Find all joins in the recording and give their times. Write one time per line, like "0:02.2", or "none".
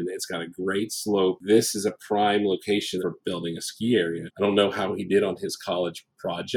0:01.4
0:03.1
0:04.3